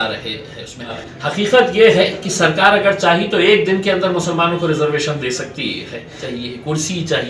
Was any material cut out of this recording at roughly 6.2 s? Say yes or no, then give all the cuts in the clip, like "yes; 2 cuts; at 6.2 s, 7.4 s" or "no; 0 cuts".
yes; 2 cuts; at 1.1 s, 6.2 s